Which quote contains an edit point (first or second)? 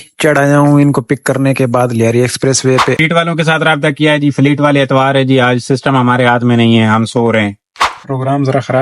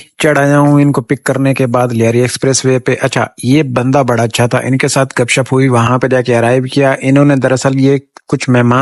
first